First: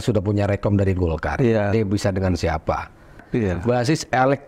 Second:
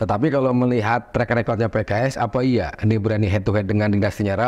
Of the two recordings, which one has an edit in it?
first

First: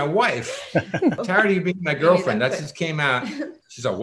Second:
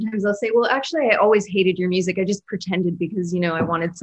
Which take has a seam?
first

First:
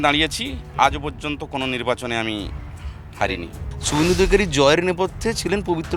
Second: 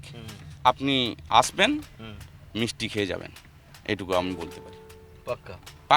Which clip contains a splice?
first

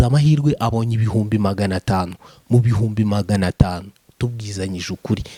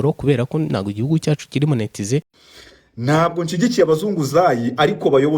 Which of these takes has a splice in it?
second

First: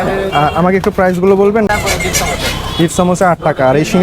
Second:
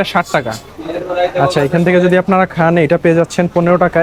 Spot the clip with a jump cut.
first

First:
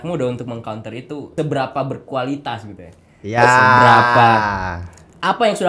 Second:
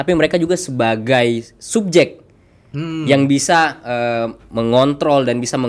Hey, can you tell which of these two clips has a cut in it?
first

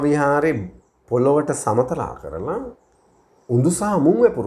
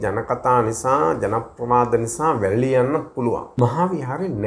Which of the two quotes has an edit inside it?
second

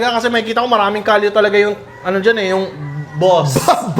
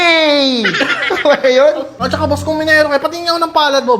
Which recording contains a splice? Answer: second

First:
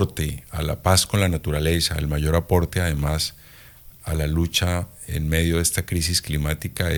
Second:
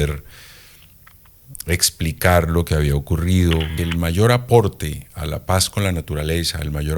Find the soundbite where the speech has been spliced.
second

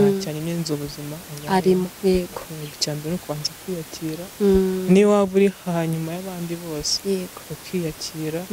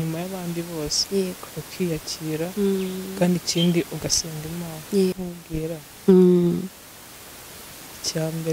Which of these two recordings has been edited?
second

